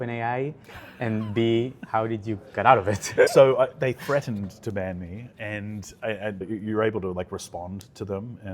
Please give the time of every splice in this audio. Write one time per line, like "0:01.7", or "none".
0:03.3
0:05.3
0:06.5